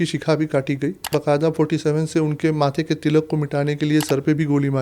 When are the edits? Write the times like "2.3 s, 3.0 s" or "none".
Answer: 1.1 s